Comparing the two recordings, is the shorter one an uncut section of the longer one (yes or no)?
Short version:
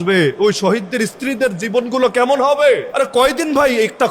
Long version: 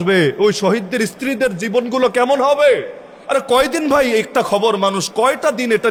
no